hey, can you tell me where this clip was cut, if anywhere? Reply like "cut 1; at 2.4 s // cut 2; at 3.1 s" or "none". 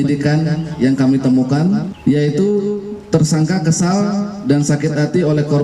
cut 1; at 1.9 s